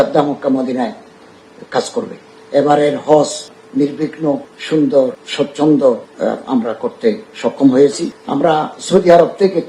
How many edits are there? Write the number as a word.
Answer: two